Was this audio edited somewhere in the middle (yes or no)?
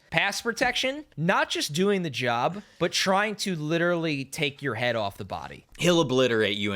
yes